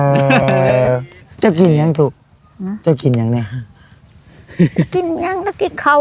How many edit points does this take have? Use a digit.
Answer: 1